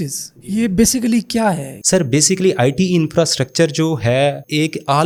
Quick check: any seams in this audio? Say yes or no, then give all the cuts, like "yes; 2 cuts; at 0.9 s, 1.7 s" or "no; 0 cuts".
no; 0 cuts